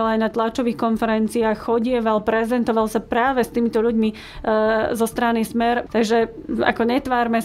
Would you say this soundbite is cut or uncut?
cut